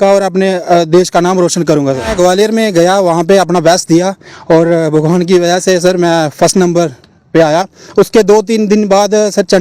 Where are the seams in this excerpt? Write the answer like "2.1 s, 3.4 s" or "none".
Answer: 2.1 s